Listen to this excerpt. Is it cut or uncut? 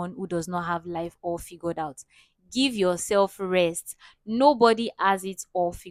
uncut